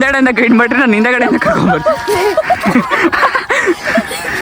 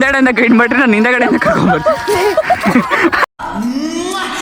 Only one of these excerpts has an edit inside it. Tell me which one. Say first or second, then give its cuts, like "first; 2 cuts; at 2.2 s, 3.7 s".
first; 1 cut; at 3.2 s